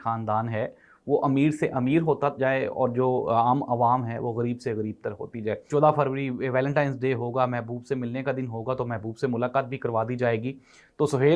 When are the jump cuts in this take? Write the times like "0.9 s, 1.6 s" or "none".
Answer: 5.6 s